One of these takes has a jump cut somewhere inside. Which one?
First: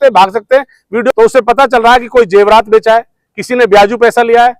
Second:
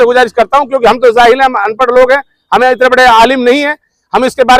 first; 1 cut; at 1.1 s

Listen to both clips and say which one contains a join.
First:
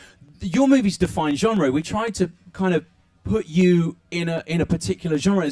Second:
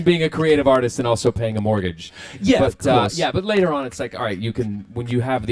second; 1 cut; at 4.2 s

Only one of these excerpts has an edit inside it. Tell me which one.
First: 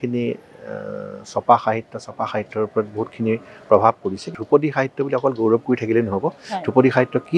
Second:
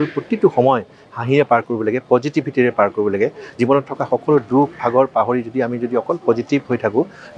first; 1 cut; at 4.4 s

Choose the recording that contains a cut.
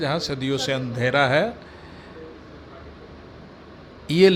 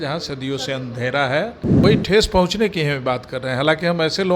second; 1 cut; at 1.7 s

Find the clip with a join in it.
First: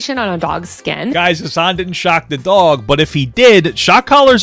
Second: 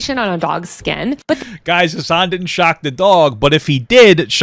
first; 1 cut; at 1.1 s

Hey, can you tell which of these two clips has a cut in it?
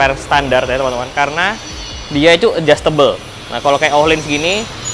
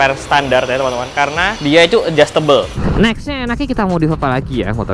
second; 2 cuts; at 1.5 s, 2.8 s

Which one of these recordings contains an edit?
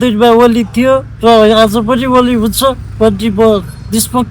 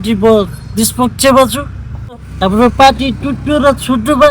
second; 1 cut; at 2.3 s

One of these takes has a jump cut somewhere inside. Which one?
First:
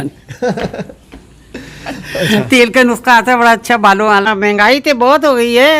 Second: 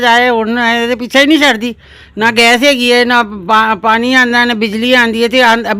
first; 1 cut; at 4.2 s

